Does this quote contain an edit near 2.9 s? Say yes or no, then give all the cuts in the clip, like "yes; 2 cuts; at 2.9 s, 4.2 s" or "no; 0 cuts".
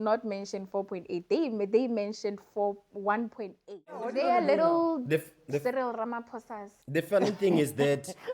no; 1 cut; at 4.1 s